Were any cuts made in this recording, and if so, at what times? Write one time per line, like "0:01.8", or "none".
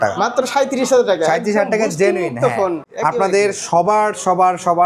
0:02.8